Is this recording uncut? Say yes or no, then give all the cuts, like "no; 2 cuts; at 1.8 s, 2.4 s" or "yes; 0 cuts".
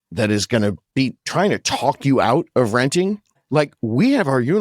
no; 2 cuts; at 0.8 s, 3.4 s